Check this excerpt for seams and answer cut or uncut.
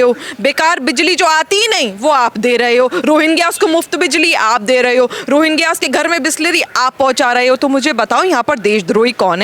uncut